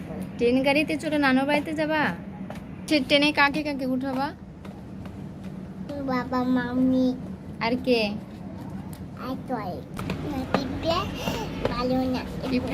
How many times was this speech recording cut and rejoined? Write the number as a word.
two